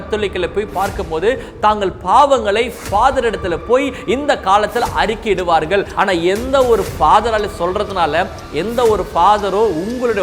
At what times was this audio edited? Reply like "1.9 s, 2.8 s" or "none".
5.9 s